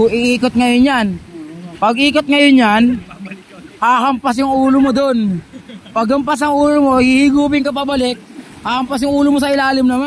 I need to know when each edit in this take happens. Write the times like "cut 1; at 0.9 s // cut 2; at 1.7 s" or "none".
none